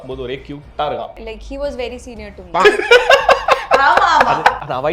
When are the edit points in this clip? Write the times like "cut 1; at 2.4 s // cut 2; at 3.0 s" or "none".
cut 1; at 1.2 s // cut 2; at 2.6 s